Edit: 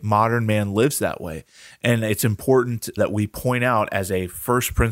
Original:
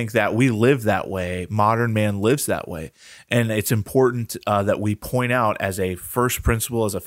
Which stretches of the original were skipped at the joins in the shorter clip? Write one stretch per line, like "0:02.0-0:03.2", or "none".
0:04.4-0:04.6